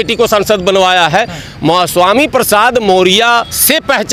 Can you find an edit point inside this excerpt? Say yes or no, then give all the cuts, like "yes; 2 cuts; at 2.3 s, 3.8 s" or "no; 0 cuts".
no; 0 cuts